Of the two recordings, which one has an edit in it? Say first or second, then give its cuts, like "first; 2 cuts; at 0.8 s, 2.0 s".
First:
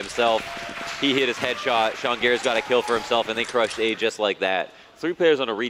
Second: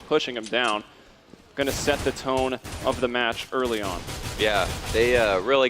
second; 1 cut; at 4.5 s